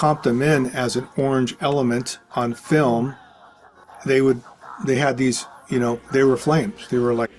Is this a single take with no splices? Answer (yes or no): yes